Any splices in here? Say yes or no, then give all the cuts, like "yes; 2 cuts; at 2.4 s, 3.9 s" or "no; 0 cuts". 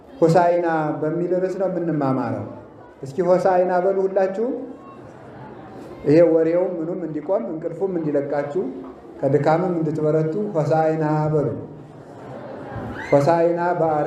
no; 0 cuts